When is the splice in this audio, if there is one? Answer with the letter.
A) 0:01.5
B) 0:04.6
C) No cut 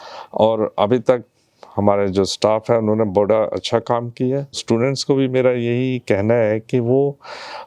B